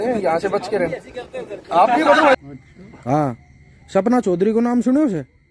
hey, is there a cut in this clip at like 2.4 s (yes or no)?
yes